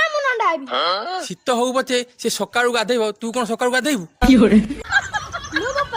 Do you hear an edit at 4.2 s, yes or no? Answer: no